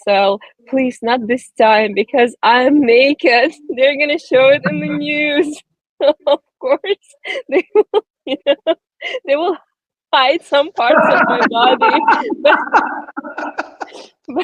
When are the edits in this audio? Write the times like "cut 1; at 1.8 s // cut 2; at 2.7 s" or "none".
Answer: none